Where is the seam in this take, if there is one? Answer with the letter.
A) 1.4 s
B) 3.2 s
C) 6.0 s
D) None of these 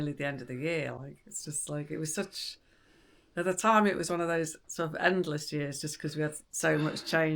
D